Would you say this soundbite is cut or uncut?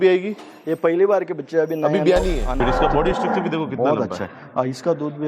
cut